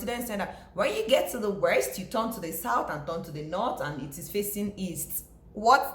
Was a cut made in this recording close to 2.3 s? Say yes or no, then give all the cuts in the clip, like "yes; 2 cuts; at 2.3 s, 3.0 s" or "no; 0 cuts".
no; 0 cuts